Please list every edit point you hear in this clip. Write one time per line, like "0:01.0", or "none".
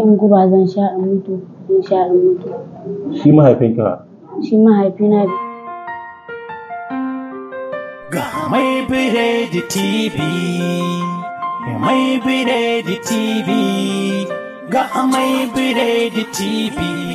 0:05.3

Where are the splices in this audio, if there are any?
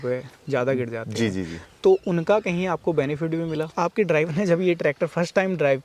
0:03.7

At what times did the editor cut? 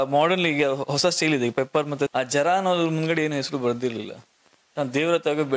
0:02.1

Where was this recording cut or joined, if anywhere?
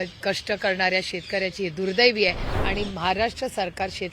0:02.6

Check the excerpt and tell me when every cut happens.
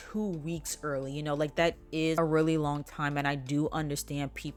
none

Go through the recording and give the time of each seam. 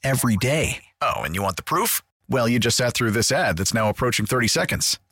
none

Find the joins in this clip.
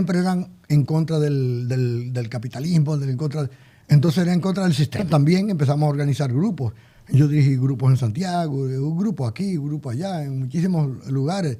0:05.0

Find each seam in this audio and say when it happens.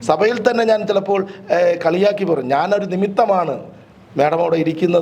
none

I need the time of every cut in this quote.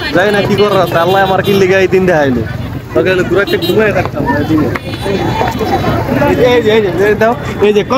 none

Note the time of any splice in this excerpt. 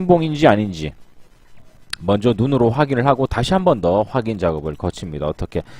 0:03.3

